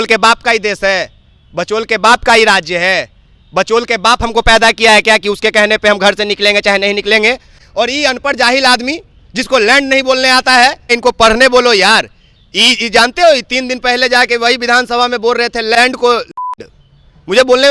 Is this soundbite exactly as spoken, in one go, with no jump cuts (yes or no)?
no